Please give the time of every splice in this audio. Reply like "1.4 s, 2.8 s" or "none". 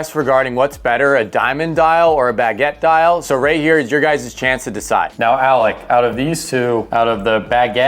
none

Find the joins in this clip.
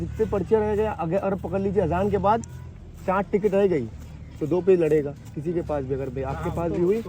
none

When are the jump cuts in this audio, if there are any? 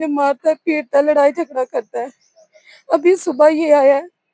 none

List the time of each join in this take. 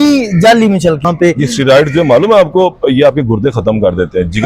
1.0 s

